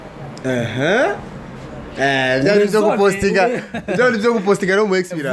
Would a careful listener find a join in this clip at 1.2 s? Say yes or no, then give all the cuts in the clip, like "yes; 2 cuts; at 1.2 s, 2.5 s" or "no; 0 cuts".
no; 0 cuts